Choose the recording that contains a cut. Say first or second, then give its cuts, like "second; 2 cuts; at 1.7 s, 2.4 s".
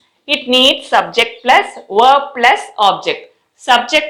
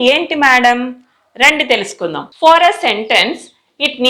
second; 1 cut; at 2.3 s